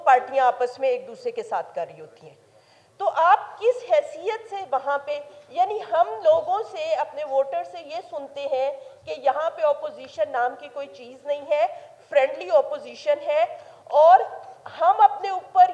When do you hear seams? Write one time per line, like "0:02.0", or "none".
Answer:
none